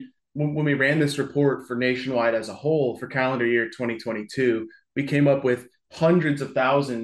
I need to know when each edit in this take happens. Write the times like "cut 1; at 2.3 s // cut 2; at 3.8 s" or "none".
none